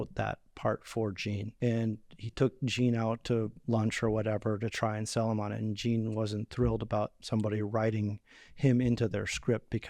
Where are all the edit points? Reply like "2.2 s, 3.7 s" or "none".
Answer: 1.5 s